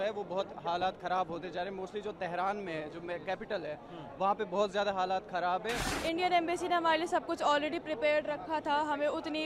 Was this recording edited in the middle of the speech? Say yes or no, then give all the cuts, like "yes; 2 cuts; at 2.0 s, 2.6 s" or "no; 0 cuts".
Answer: yes; 1 cut; at 5.9 s